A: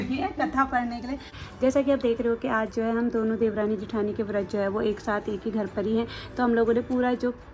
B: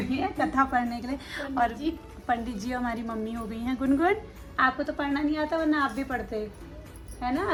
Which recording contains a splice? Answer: A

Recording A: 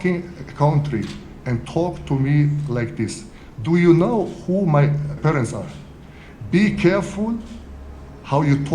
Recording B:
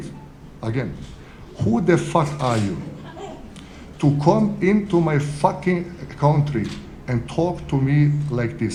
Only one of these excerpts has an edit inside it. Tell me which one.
A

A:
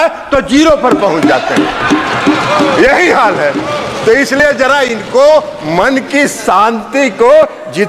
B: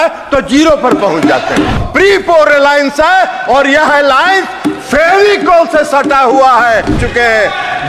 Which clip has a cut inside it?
B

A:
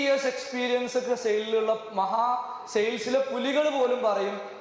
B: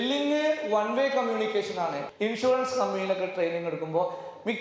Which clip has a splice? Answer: B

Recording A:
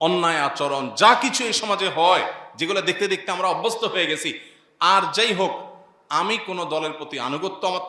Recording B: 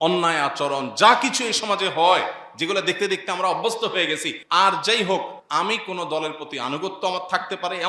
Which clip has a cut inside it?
B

